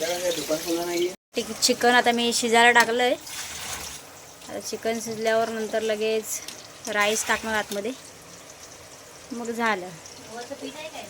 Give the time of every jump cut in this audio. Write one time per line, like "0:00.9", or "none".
0:01.2